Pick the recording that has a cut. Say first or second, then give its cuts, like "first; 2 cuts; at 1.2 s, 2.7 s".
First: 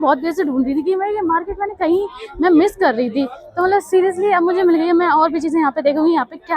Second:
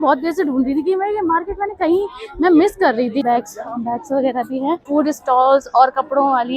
second; 2 cuts; at 3.2 s, 4.8 s